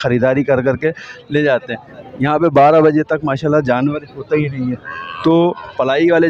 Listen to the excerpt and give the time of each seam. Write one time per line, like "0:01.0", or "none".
none